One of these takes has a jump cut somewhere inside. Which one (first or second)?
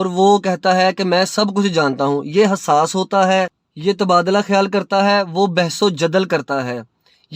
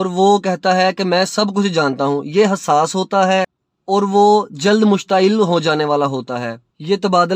first